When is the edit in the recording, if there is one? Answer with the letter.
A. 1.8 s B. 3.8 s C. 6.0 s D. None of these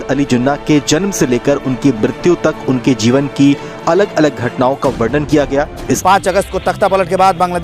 C